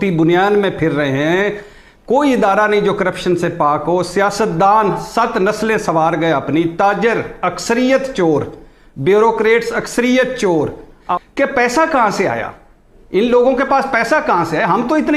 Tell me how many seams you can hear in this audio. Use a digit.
0